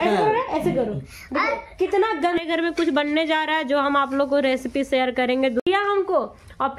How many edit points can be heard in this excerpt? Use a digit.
2